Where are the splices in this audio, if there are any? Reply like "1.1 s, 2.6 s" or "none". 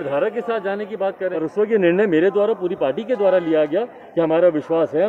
1.4 s

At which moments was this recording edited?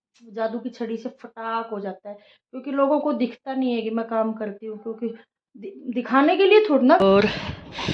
7.0 s

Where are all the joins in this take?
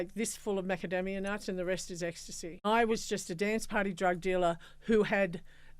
2.6 s

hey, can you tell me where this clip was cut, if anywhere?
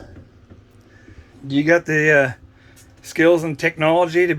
1.2 s

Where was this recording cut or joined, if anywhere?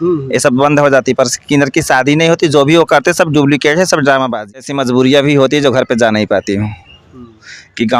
4.5 s

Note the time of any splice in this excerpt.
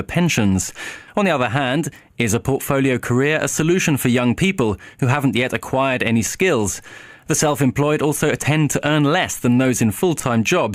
9.2 s

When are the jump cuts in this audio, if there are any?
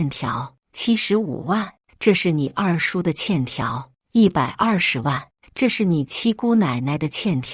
none

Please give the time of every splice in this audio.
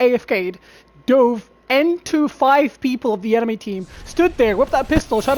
none

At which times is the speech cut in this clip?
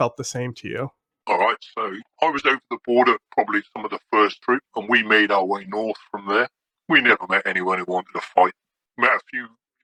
none

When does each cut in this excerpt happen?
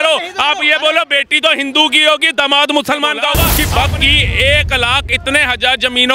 3.5 s

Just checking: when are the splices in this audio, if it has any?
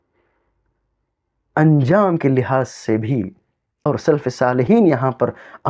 3.7 s

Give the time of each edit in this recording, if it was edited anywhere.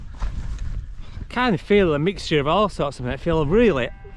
1.0 s

